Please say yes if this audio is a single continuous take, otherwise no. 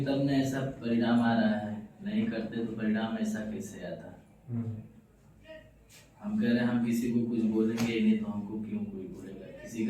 yes